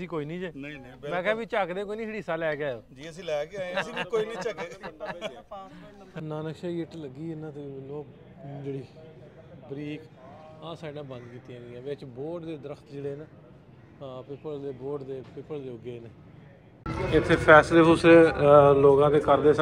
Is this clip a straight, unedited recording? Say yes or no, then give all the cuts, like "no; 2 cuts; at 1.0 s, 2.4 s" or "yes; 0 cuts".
no; 2 cuts; at 6.2 s, 16.9 s